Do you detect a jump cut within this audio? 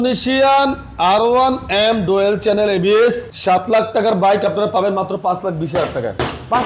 no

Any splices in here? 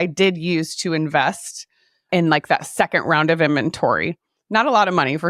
no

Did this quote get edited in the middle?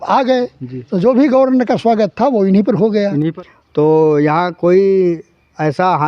yes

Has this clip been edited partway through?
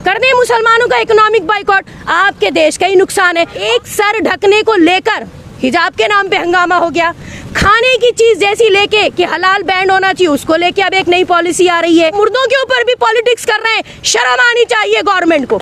yes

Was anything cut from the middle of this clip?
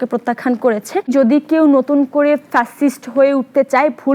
yes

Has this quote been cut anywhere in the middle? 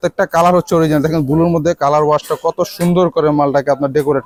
no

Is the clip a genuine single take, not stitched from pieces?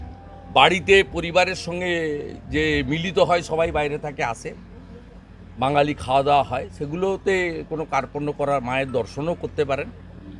yes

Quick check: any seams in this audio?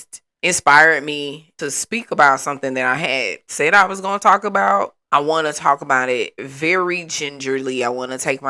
yes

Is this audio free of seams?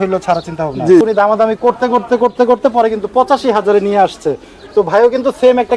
no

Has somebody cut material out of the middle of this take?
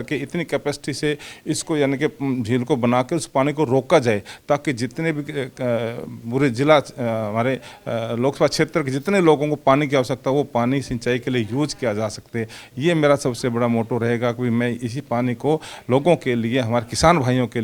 no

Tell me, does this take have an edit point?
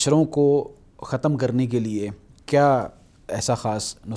no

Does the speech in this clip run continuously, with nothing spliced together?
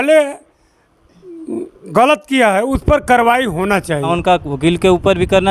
no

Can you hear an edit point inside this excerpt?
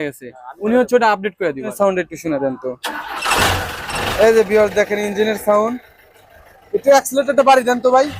yes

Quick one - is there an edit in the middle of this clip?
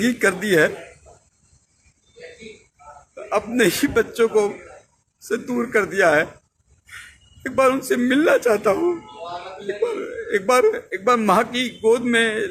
no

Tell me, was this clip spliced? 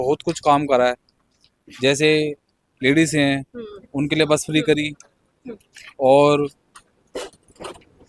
no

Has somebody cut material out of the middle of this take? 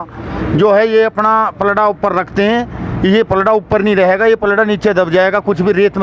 no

